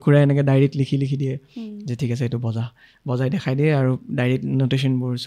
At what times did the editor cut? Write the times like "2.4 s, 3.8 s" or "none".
none